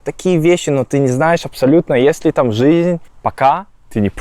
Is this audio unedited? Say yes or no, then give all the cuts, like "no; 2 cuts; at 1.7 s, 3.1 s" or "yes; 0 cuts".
no; 1 cut; at 3.1 s